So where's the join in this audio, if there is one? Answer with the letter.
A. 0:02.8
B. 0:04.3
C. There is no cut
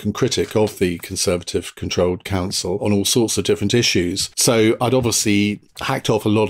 A